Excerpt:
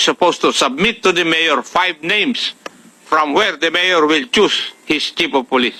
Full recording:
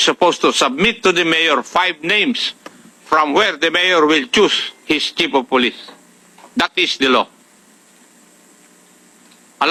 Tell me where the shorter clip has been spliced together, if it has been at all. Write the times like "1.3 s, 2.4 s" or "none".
none